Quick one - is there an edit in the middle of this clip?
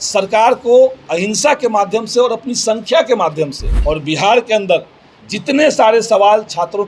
yes; 1 cut; at 3.7 s

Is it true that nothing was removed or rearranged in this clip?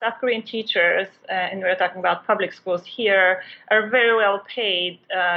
yes; 0 cuts

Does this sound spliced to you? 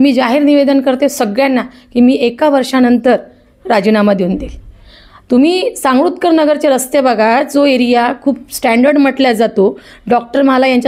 no; 0 cuts

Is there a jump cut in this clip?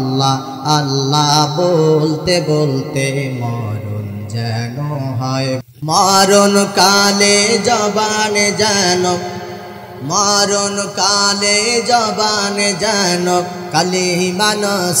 yes; 1 cut; at 5.6 s

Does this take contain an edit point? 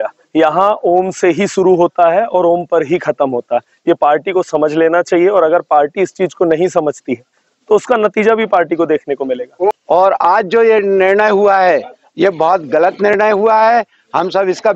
yes; 1 cut; at 9.8 s

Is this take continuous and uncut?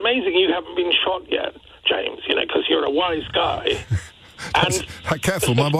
yes; 0 cuts

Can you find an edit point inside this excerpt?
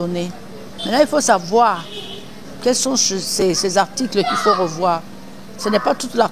yes; 1 cut; at 1.0 s

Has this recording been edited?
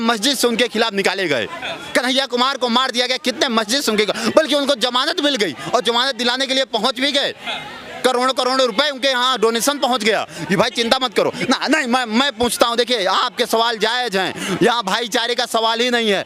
no; 0 cuts

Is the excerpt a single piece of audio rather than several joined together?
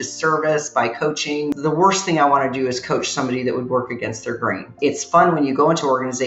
no; 2 cuts; at 1.5 s, 4.7 s

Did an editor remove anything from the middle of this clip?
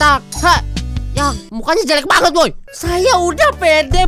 yes; 1 cut; at 2.7 s

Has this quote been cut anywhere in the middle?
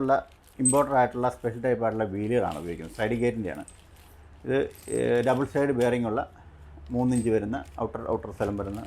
no; 0 cuts

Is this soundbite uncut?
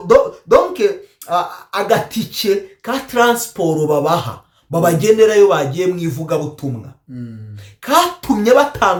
yes; 0 cuts

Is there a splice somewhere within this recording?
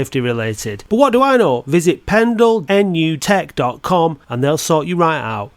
yes; 1 cut; at 2.9 s

